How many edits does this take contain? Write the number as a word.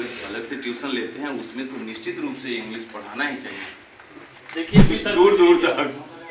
one